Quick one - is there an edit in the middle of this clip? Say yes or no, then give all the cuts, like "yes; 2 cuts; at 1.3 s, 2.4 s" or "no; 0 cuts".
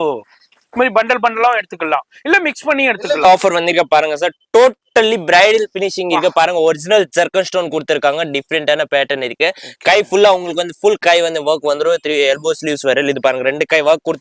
yes; 1 cut; at 3.2 s